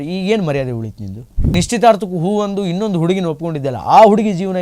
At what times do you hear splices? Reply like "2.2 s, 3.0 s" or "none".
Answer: 1.6 s